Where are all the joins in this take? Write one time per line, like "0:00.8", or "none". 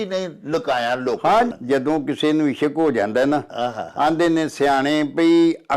0:01.5